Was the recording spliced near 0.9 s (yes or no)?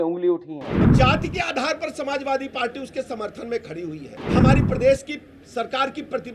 yes